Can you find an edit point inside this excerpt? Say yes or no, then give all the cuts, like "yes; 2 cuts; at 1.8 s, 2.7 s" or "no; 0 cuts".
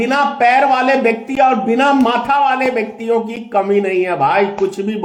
no; 0 cuts